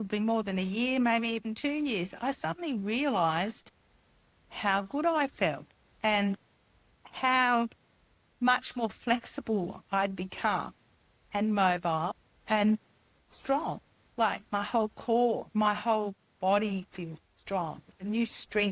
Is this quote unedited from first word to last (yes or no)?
yes